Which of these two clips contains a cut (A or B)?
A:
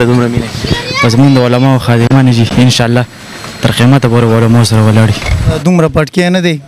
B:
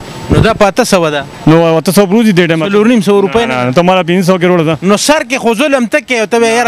A